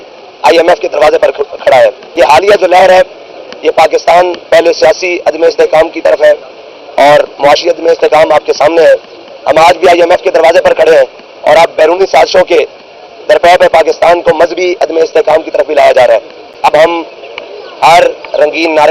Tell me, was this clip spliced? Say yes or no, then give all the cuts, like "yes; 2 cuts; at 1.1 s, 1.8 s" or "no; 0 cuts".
yes; 2 cuts; at 2.2 s, 16.4 s